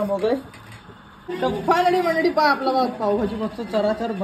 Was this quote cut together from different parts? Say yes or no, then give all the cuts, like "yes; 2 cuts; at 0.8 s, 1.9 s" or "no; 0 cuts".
yes; 1 cut; at 1.2 s